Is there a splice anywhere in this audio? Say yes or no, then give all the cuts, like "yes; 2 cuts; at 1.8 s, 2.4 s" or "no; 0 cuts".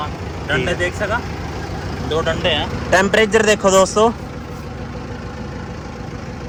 no; 0 cuts